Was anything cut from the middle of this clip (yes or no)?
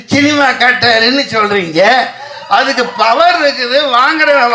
no